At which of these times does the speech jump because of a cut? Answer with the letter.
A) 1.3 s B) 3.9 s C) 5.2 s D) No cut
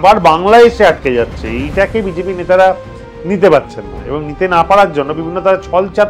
D